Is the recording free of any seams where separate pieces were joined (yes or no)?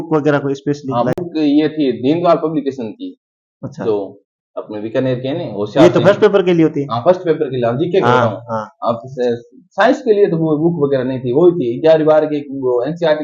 yes